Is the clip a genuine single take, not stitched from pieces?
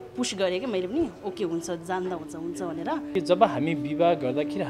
no; 1 cut; at 3.1 s

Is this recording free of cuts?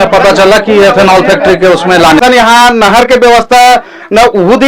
no; 1 cut; at 2.2 s

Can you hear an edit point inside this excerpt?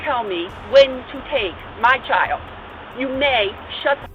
no; 0 cuts

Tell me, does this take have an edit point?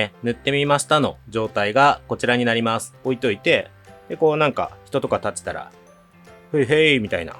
yes; 1 cut; at 2.9 s

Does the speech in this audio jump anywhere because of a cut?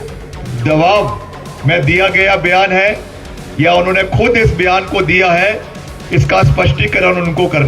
no; 0 cuts

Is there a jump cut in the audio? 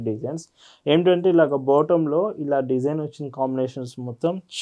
no; 0 cuts

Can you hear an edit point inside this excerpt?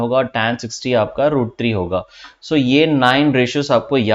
no; 0 cuts

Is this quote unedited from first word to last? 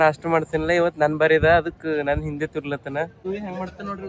no; 1 cut; at 3.2 s

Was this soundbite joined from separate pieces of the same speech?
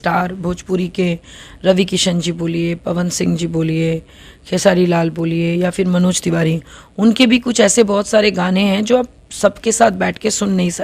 no; 0 cuts

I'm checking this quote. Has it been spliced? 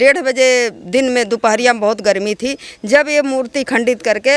no; 0 cuts

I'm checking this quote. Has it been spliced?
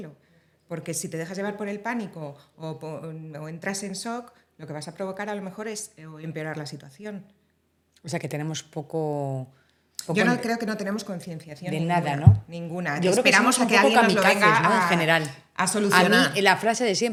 no; 0 cuts

